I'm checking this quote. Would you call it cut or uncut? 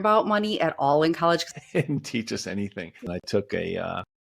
cut